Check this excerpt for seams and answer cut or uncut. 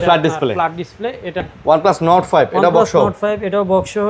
cut